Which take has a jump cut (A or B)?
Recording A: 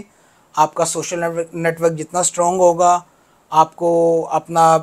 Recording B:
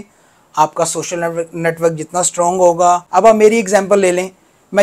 B